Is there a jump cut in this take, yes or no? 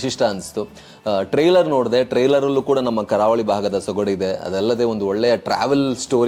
no